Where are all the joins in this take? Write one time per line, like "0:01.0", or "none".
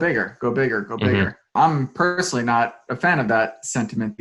0:01.5